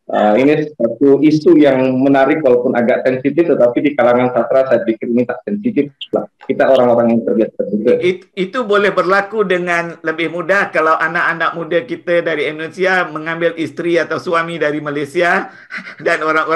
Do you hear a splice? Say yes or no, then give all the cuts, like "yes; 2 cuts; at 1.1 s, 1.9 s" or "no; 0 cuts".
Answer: no; 0 cuts